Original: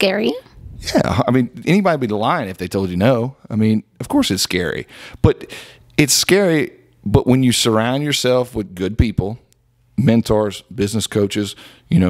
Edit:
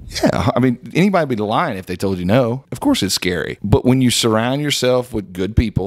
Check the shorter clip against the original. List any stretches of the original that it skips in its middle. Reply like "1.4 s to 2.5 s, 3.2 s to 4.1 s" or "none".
3.4 s to 4.0 s, 4.8 s to 6.9 s